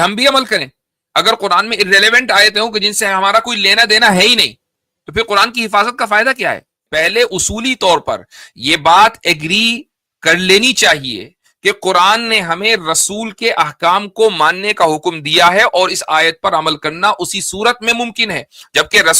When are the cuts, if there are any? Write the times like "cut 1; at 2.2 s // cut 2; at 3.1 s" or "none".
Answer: cut 1; at 6.8 s